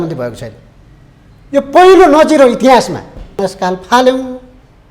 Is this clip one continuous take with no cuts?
no; 1 cut; at 3.4 s

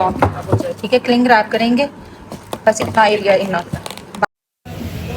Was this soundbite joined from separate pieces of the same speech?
yes; 1 cut; at 4.2 s

